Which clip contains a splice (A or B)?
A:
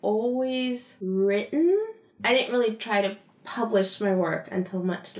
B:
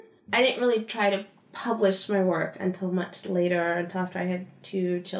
A